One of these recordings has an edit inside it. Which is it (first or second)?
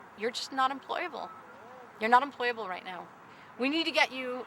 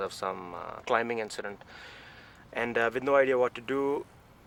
first